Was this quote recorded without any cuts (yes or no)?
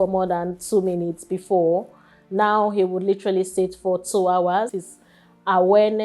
no